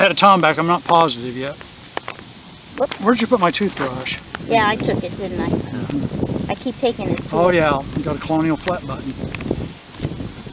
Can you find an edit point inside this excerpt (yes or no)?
no